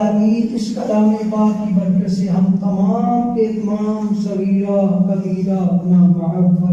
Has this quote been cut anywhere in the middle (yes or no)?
no